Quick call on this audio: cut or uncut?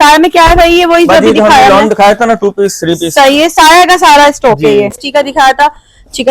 cut